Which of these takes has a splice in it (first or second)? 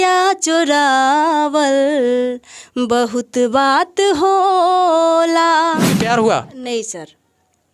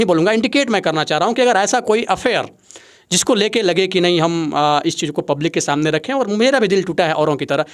first